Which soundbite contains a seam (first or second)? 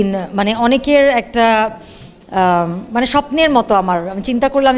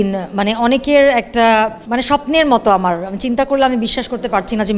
second